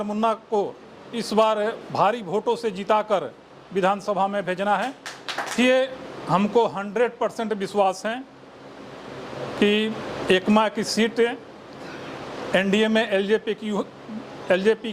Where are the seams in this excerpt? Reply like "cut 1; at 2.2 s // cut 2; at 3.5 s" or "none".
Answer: cut 1; at 5.5 s